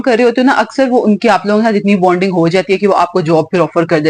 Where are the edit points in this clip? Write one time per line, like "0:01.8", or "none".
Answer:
none